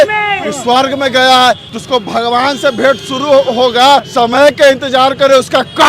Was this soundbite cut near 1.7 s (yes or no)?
yes